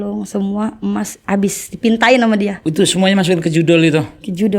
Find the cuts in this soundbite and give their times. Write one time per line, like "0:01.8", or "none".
0:02.6

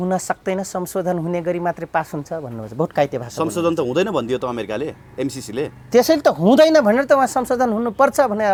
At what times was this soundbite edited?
none

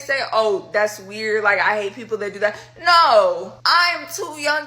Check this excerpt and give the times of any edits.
0:03.5

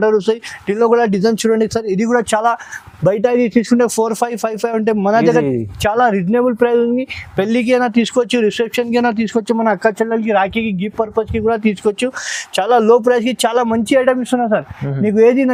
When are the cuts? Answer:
none

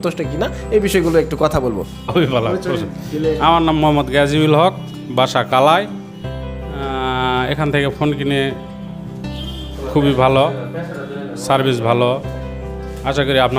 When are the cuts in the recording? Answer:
0:02.1

